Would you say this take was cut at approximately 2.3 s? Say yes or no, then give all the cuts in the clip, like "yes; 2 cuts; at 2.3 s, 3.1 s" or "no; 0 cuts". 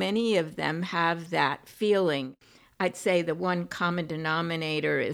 yes; 1 cut; at 2.3 s